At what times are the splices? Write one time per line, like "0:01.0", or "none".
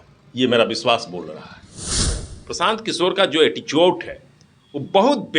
0:02.1

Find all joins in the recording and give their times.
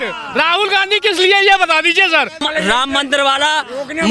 0:02.4

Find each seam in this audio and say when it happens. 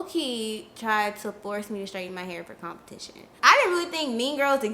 0:03.3

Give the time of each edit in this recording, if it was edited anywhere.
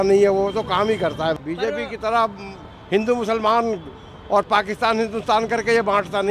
0:01.4

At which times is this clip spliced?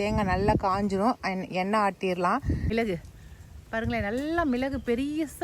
0:02.7

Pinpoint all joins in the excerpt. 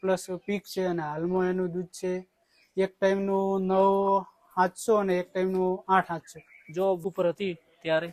0:07.0

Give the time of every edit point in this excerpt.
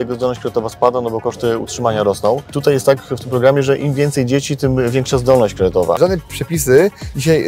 0:02.5
0:06.0

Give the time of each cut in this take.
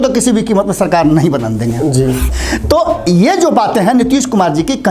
0:02.3

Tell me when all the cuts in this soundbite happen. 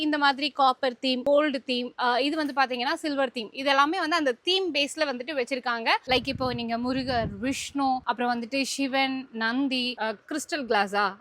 0:06.1
0:09.9

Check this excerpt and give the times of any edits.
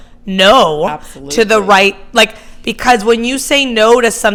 none

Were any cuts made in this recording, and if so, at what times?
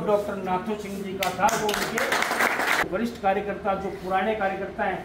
0:02.8

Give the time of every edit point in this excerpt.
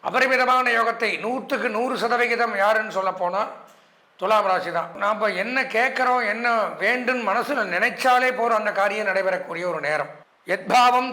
0:04.9

